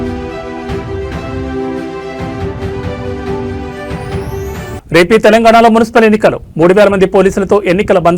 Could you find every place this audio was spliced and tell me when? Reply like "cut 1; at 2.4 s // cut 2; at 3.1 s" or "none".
cut 1; at 3.7 s